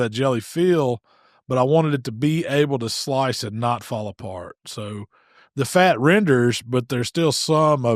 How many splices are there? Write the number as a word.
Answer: zero